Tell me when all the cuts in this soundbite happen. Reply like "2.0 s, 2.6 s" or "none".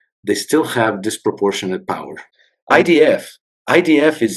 2.2 s